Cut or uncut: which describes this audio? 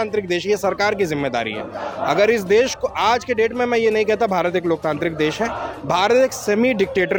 uncut